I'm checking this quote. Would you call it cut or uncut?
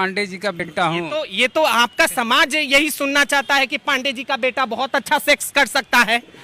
uncut